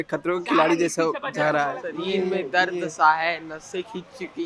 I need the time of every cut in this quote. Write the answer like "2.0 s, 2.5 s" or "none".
1.8 s